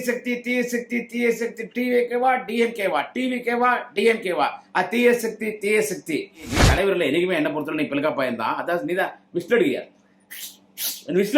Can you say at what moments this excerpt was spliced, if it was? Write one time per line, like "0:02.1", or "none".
0:06.5

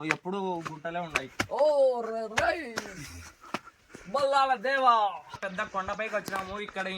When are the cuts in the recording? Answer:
0:01.3
0:05.4

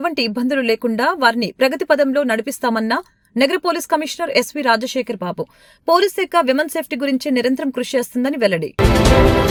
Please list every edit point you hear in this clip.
none

